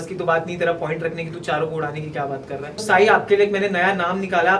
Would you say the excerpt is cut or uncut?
cut